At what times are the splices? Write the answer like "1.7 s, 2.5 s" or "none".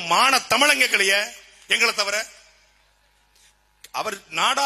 none